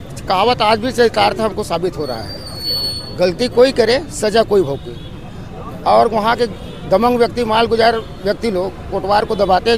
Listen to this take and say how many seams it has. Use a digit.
0